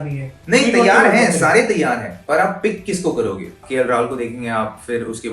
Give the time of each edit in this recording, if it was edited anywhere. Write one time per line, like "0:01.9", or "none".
0:03.6